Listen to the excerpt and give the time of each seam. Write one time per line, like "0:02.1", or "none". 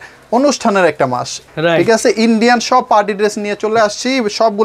0:01.4